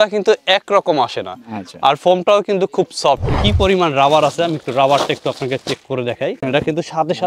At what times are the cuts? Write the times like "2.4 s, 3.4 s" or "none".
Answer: 3.4 s, 6.4 s